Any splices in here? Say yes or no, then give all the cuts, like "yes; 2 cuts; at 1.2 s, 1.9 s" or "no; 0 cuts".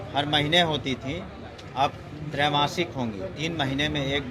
no; 0 cuts